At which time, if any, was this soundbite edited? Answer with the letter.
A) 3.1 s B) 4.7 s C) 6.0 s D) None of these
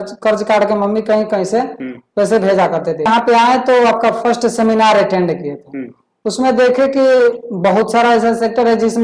A